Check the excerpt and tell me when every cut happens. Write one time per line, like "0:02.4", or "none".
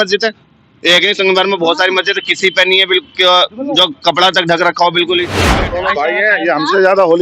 0:05.4